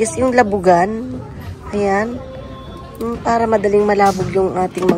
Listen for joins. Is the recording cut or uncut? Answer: uncut